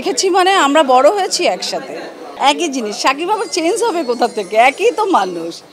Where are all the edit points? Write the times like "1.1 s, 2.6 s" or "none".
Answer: 2.2 s